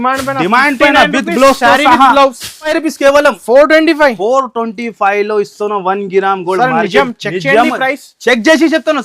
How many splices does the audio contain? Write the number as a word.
one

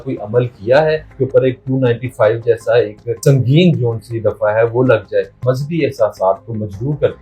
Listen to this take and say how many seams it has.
three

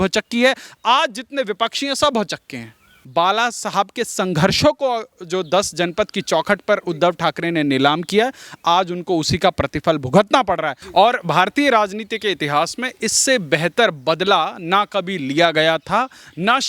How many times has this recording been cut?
two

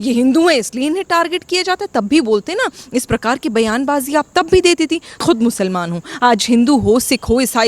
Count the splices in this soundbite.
one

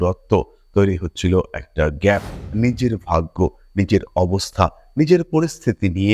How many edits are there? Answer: one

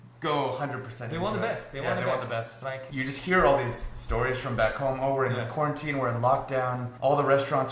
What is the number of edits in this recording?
one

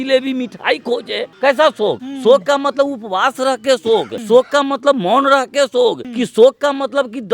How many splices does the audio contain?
four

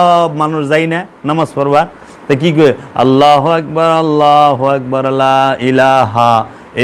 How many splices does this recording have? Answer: zero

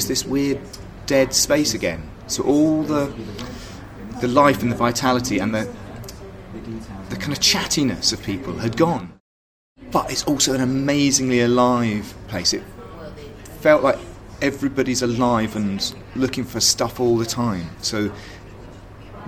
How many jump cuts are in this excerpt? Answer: one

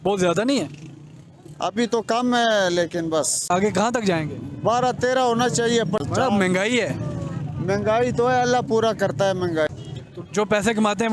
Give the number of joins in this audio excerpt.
three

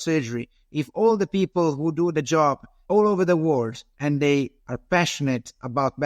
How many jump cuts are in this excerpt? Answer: two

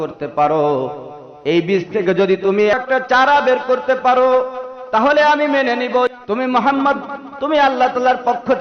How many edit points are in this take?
two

